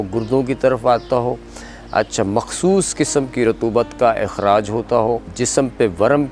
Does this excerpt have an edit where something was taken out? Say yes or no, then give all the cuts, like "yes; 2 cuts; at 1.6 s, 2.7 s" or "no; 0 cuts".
yes; 1 cut; at 5.3 s